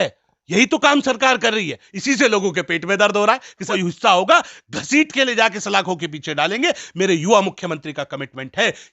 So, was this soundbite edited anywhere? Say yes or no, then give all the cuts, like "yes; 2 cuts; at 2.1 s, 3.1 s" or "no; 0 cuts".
yes; 1 cut; at 3.6 s